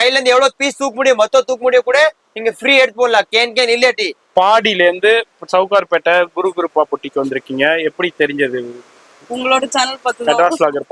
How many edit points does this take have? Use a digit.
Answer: 1